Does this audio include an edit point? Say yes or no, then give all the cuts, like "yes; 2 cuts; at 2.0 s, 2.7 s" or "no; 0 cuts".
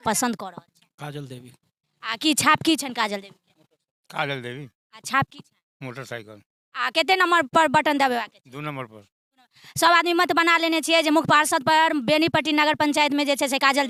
no; 0 cuts